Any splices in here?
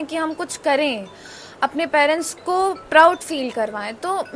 no; 0 cuts

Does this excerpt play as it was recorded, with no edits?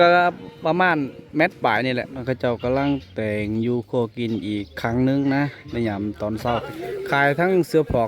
no; 2 cuts; at 2.2 s, 6.7 s

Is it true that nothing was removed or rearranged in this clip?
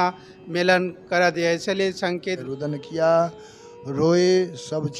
no; 1 cut; at 2.3 s

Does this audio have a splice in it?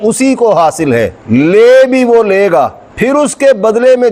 no; 0 cuts

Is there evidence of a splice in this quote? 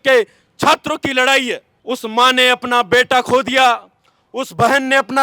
yes; 1 cut; at 1.7 s

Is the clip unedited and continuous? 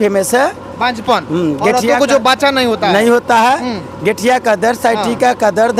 yes; 0 cuts

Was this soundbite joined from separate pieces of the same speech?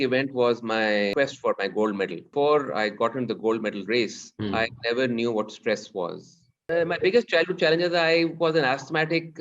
yes; 4 cuts; at 1.1 s, 2.3 s, 4.3 s, 6.7 s

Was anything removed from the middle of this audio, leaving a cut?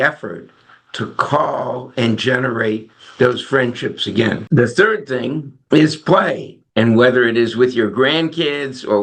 no; 0 cuts

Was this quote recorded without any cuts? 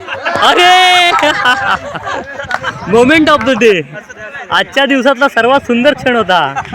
yes; 0 cuts

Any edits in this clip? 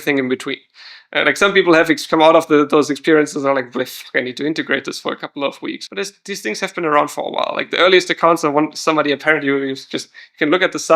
yes; 1 cut; at 5.8 s

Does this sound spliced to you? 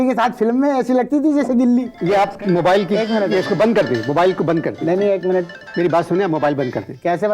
yes; 1 cut; at 1.9 s

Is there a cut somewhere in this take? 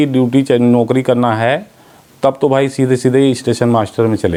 no; 0 cuts

